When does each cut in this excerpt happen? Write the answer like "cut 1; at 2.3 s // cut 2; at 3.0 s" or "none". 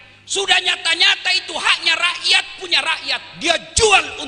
none